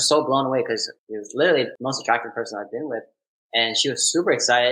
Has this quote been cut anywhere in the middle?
yes; 2 cuts; at 1.0 s, 1.7 s

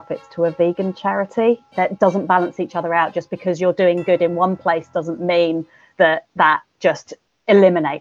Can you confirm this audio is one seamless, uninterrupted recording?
no; 1 cut; at 1.7 s

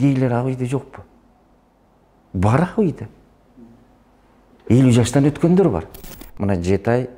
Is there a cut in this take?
yes; 1 cut; at 5.9 s

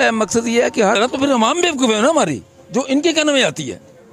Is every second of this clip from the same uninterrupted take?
no; 1 cut; at 1.0 s

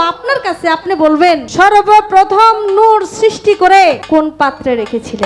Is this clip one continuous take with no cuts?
no; 2 cuts; at 1.5 s, 4.0 s

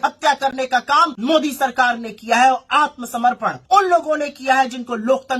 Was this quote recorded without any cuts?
no; 2 cuts; at 1.1 s, 3.5 s

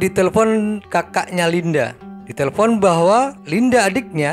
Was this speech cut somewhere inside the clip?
no; 0 cuts

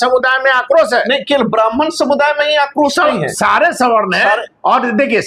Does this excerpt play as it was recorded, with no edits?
yes; 0 cuts

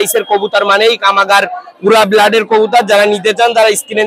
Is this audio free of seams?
yes; 0 cuts

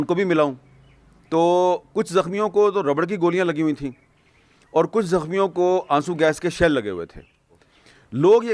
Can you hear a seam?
no; 0 cuts

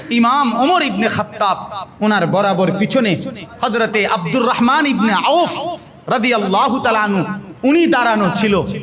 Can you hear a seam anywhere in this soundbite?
no; 0 cuts

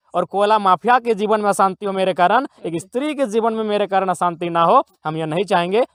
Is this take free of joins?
yes; 0 cuts

